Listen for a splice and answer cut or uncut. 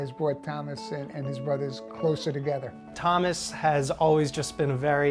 uncut